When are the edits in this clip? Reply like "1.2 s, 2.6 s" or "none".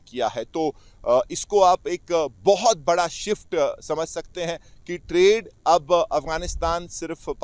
none